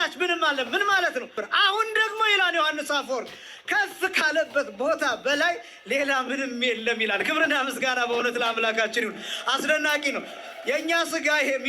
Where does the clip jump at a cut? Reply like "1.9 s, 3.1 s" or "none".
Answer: 1.4 s